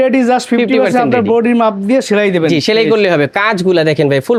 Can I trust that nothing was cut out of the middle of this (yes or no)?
yes